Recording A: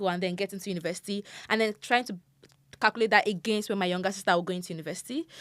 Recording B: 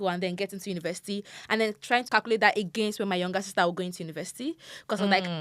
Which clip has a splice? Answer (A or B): B